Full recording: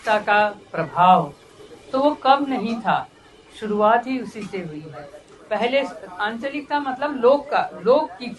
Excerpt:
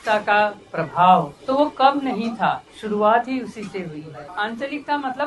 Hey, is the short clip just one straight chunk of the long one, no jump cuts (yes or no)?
no